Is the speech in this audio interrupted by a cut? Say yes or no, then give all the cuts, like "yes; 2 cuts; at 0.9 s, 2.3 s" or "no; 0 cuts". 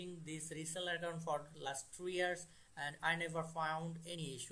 no; 0 cuts